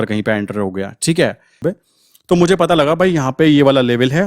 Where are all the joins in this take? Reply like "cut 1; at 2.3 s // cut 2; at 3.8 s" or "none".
cut 1; at 1.5 s